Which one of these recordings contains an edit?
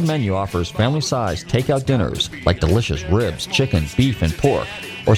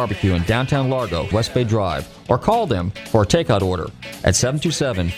second; 1 cut; at 1.3 s

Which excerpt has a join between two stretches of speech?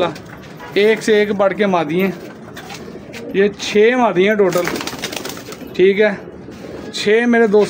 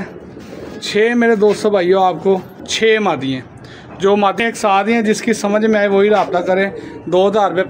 second; 2 cuts; at 2.6 s, 4.4 s

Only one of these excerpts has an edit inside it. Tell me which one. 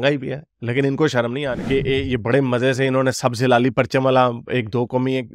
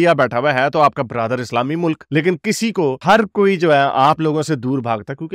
first; 1 cut; at 1.6 s

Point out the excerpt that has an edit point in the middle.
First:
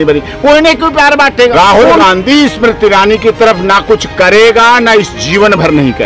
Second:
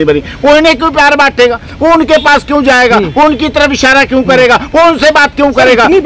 first; 1 cut; at 1.5 s

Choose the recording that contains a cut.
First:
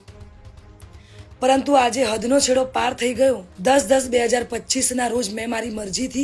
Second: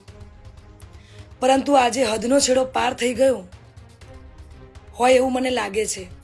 first; 1 cut; at 3.5 s

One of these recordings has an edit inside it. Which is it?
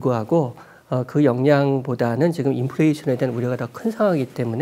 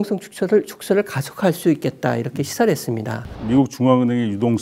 second; 1 cut; at 3.3 s

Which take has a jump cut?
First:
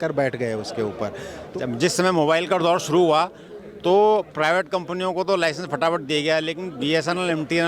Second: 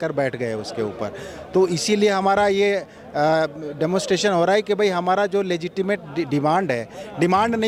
first; 1 cut; at 1.4 s

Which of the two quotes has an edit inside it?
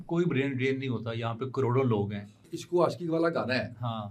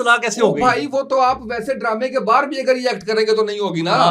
first; 1 cut; at 2.5 s

